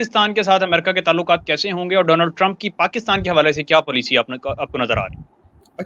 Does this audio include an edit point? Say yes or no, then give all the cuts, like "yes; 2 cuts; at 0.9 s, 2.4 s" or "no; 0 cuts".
no; 0 cuts